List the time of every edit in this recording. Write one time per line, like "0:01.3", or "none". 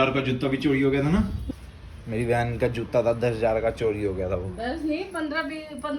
0:01.4

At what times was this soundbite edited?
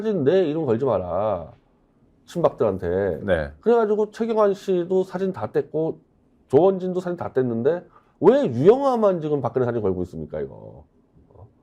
none

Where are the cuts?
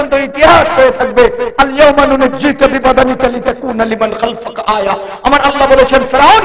none

